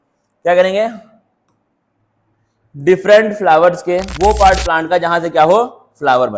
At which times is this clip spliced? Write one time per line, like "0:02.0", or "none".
0:04.1